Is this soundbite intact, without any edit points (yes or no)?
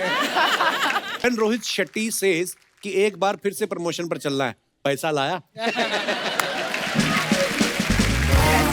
no